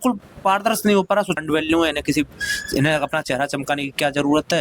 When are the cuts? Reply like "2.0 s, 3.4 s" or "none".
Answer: 1.4 s